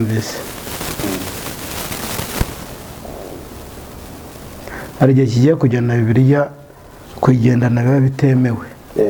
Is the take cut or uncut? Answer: uncut